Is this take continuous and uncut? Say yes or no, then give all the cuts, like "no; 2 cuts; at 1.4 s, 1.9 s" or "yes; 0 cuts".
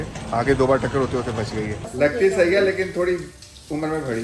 no; 1 cut; at 1.8 s